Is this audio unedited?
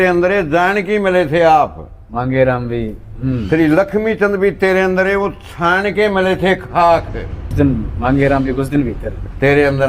no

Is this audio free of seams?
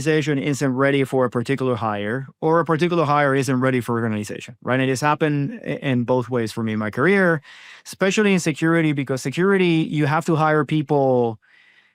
yes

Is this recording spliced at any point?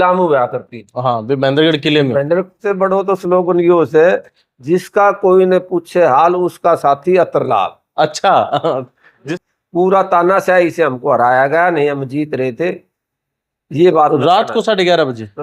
yes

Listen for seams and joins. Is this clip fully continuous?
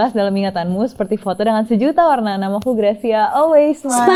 yes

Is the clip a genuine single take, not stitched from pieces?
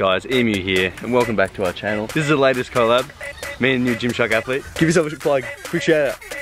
no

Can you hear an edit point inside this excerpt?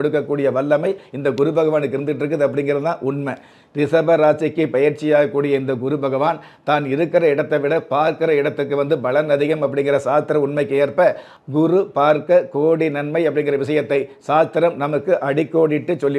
yes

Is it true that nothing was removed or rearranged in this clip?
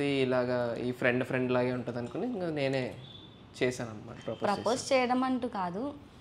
yes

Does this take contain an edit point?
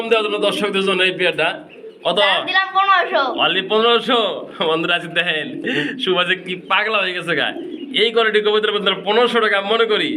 no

